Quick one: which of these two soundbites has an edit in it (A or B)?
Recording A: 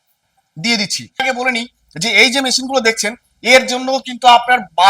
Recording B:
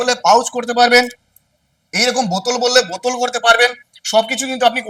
A